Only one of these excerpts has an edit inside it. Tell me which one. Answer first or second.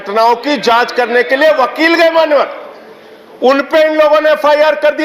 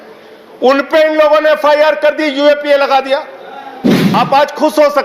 second